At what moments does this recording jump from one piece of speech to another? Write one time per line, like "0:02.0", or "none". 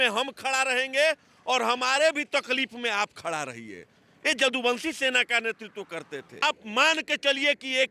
0:06.4

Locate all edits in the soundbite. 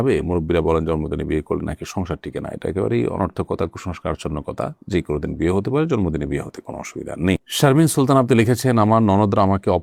none

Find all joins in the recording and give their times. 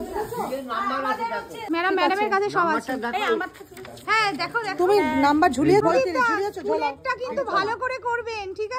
0:01.6
0:05.8

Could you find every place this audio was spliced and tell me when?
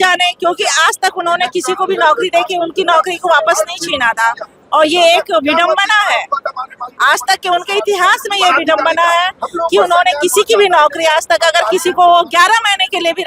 none

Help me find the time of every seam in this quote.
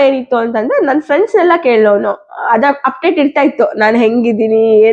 none

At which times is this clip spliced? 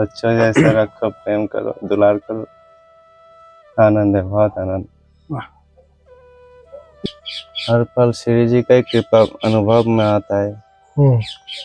0:07.1

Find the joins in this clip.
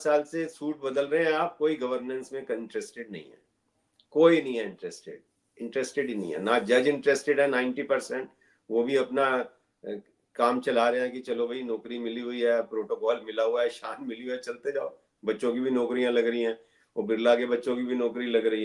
none

